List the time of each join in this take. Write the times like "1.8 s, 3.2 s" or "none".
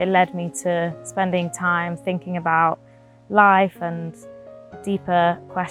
none